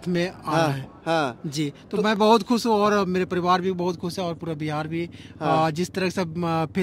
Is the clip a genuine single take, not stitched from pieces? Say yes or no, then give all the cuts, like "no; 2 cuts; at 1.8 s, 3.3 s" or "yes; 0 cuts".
yes; 0 cuts